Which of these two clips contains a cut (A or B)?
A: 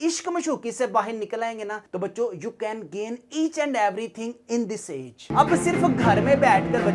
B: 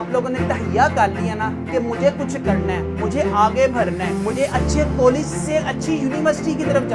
A